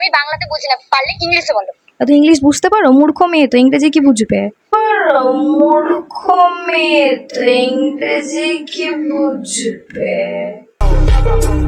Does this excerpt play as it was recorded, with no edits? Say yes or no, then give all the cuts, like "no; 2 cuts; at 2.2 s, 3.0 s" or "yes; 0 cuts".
yes; 0 cuts